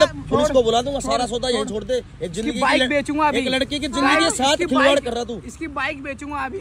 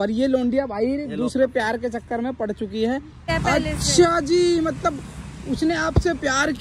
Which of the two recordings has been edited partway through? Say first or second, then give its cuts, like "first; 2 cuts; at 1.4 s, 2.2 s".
second; 1 cut; at 3.3 s